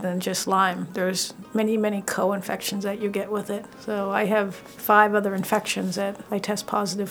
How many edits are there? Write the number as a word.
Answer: three